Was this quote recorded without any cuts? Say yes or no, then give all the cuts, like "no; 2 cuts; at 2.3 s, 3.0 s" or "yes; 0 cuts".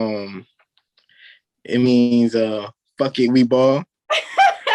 yes; 0 cuts